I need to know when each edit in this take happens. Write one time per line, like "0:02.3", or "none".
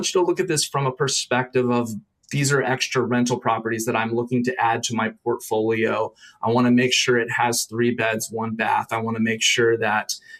none